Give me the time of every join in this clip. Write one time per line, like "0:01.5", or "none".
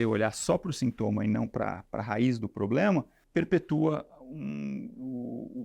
0:03.2